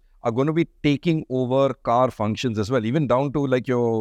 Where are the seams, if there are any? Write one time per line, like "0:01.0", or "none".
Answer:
none